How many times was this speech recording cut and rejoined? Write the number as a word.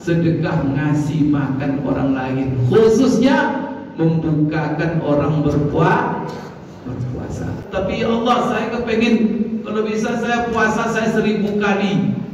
one